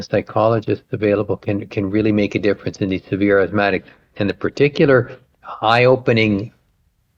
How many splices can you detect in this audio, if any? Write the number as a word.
zero